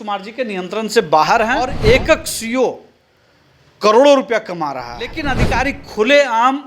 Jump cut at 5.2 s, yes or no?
yes